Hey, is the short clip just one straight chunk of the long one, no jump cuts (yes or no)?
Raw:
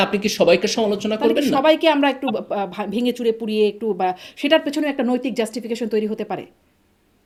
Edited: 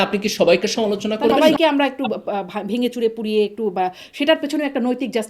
no